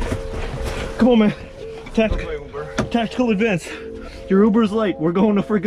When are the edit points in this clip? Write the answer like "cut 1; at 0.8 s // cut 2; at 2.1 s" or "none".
none